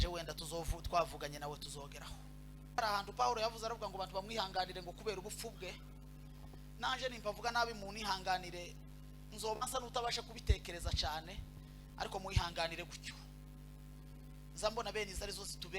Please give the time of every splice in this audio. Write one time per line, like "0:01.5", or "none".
0:02.8